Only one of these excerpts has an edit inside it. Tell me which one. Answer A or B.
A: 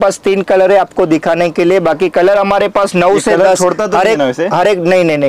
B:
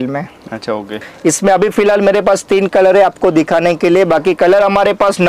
B